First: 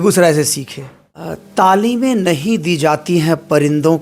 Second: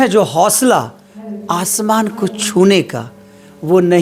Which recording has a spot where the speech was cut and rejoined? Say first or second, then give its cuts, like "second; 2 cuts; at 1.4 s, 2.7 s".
first; 1 cut; at 1.4 s